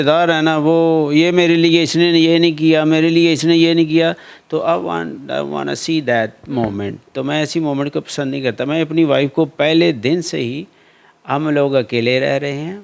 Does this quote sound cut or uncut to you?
uncut